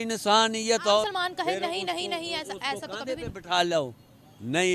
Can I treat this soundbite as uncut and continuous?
no; 1 cut; at 1.0 s

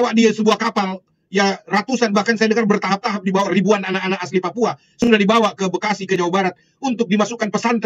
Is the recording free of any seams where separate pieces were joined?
yes; 0 cuts

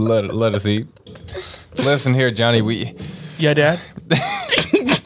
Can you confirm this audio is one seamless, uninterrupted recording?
no; 1 cut; at 1.7 s

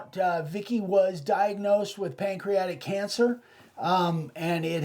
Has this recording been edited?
no; 0 cuts

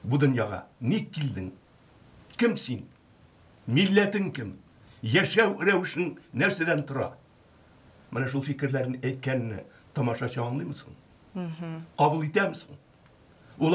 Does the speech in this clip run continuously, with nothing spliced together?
yes; 0 cuts

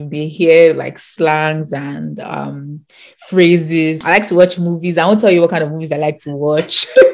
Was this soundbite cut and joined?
yes; 1 cut; at 4.0 s

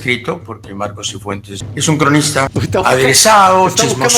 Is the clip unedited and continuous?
no; 2 cuts; at 1.6 s, 2.5 s

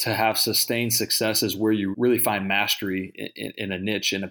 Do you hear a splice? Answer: yes; 1 cut; at 1.9 s

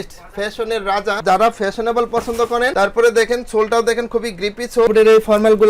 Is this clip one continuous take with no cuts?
no; 3 cuts; at 1.2 s, 2.7 s, 4.9 s

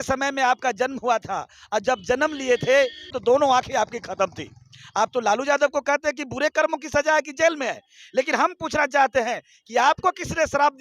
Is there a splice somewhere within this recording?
yes; 1 cut; at 3.1 s

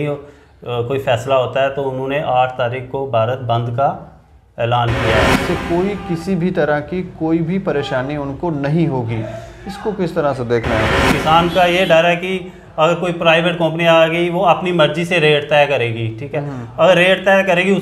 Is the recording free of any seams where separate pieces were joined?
no; 2 cuts; at 5.3 s, 11.1 s

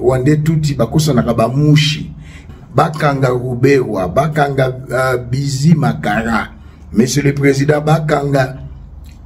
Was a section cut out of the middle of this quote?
yes; 1 cut; at 2.5 s

